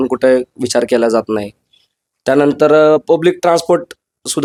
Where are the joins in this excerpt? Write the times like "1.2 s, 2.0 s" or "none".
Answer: none